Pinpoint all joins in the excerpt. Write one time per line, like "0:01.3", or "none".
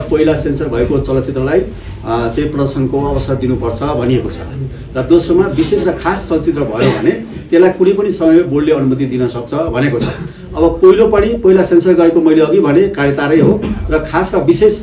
none